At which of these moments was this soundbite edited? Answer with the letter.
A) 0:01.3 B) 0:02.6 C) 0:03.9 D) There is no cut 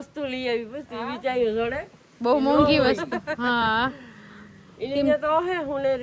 D